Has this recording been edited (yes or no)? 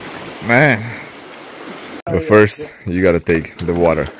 yes